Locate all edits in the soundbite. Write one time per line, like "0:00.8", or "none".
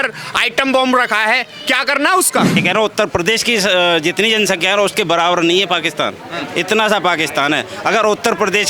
0:02.6